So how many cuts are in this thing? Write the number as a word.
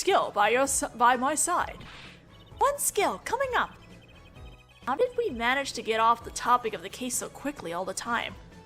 one